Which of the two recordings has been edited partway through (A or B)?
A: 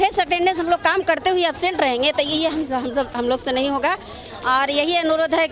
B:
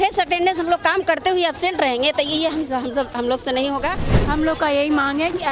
B